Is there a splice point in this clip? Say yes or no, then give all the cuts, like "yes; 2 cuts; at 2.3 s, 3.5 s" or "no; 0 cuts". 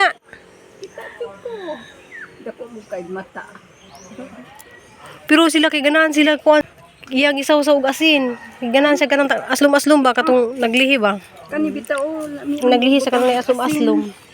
yes; 1 cut; at 6.6 s